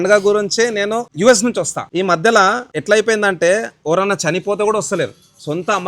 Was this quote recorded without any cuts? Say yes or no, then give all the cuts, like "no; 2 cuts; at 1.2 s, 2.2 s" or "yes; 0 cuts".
no; 3 cuts; at 1.1 s, 1.8 s, 2.7 s